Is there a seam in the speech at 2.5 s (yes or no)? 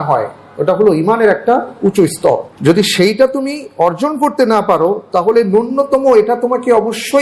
yes